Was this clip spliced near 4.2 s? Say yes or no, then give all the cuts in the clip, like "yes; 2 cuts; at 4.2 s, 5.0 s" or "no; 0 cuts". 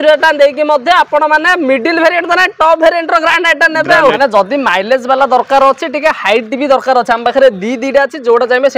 yes; 1 cut; at 4.2 s